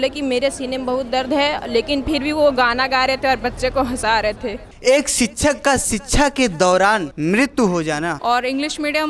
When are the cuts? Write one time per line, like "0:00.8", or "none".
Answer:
0:04.7
0:07.1
0:08.2